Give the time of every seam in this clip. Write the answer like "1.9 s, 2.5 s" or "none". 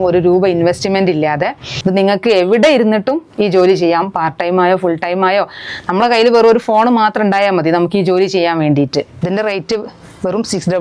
1.7 s, 9.1 s